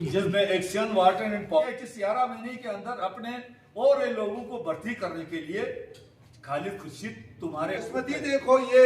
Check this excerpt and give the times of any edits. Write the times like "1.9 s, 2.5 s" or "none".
1.6 s, 7.8 s